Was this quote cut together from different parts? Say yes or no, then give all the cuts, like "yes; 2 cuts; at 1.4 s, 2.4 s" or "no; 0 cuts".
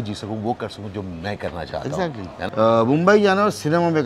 yes; 1 cut; at 2.5 s